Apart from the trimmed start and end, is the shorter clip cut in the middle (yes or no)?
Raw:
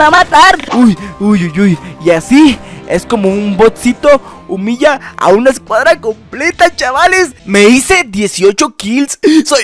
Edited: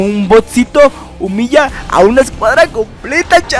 no